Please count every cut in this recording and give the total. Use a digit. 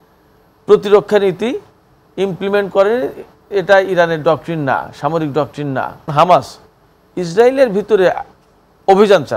1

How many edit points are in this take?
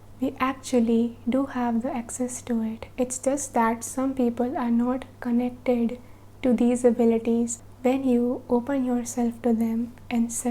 1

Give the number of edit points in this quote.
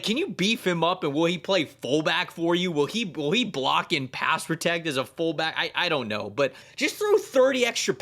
1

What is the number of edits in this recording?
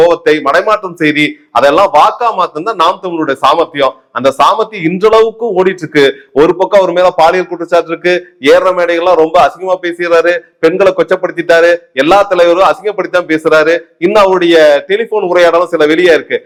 0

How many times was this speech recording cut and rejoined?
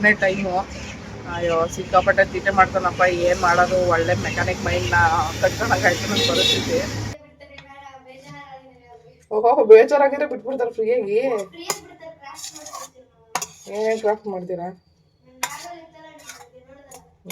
1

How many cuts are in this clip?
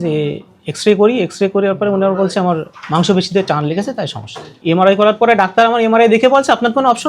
1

